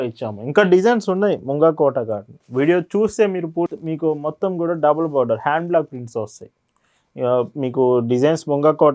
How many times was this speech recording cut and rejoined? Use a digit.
1